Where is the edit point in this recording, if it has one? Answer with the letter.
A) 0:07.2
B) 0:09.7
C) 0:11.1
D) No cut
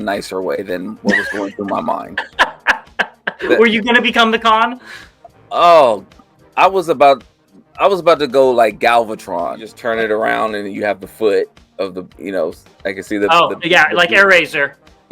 B